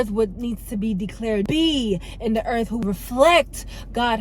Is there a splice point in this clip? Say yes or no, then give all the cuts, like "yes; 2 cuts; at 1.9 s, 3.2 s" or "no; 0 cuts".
yes; 2 cuts; at 1.5 s, 2.8 s